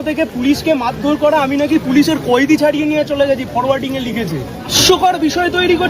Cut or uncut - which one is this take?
cut